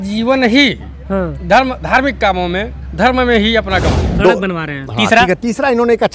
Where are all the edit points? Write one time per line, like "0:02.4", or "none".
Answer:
0:04.0